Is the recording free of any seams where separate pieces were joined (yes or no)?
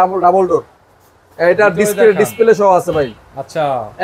yes